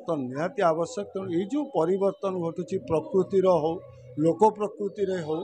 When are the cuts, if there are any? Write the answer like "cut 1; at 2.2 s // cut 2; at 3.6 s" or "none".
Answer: none